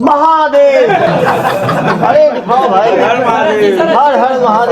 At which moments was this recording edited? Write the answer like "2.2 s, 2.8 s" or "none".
1.0 s

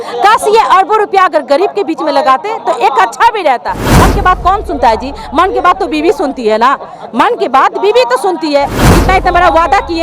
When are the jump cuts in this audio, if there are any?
8.8 s

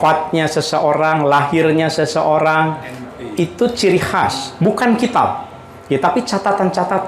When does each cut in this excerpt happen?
none

